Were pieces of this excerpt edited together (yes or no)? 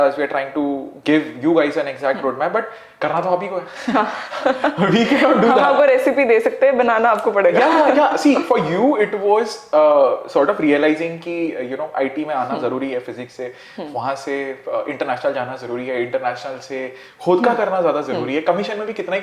no